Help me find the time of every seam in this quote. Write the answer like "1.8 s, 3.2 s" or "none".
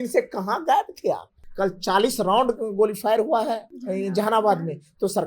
1.4 s, 3.8 s